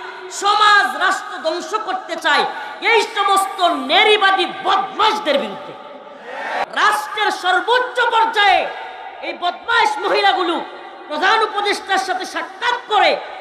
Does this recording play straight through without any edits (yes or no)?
no